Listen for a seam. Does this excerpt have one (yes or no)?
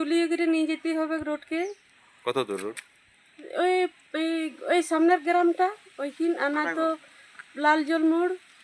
no